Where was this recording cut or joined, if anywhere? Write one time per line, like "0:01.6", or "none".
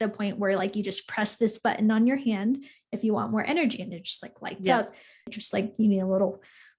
0:05.3